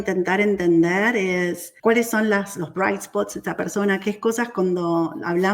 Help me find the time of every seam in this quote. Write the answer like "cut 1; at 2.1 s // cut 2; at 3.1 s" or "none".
cut 1; at 1.7 s